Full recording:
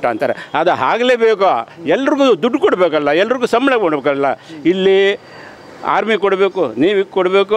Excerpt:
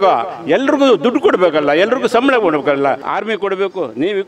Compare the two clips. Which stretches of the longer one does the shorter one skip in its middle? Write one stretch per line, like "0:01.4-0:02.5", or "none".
0:04.5-0:05.9